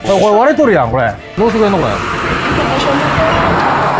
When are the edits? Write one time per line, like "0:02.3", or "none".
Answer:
0:01.4